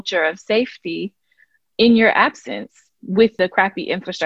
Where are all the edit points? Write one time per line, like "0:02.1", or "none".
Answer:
0:03.3